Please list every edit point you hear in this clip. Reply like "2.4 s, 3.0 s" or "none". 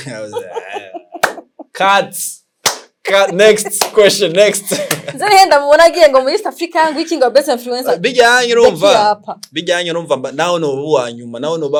none

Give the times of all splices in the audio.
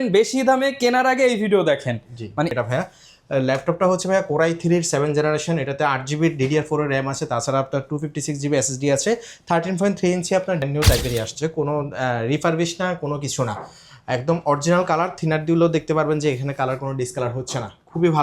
2.5 s, 10.7 s

